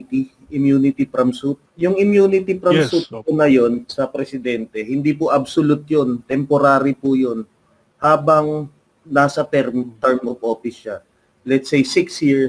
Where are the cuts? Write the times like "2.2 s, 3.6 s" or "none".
1.7 s